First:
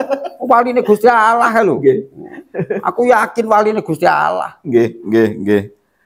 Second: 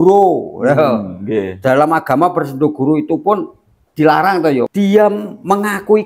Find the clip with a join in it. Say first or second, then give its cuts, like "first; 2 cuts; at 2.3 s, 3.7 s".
second; 1 cut; at 4.7 s